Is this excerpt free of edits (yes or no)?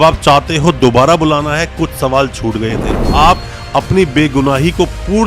no